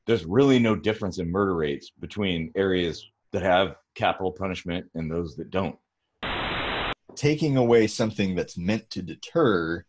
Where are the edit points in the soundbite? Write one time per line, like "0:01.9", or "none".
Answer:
0:06.5